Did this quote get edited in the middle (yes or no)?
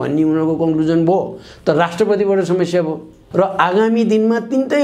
yes